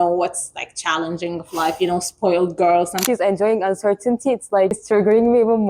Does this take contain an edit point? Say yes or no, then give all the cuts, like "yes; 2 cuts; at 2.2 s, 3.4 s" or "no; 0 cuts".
yes; 2 cuts; at 3.0 s, 4.8 s